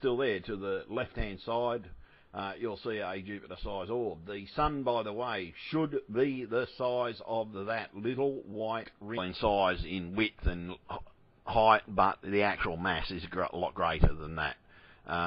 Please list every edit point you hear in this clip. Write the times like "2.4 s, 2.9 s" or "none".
none